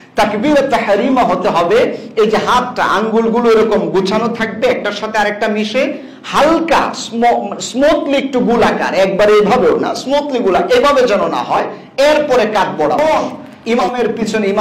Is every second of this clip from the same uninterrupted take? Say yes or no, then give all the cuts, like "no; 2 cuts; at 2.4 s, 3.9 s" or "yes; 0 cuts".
no; 1 cut; at 13.0 s